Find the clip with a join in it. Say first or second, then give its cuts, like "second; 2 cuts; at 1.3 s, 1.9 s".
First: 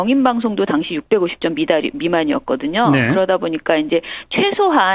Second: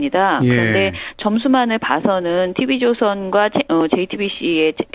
second; 1 cut; at 2.8 s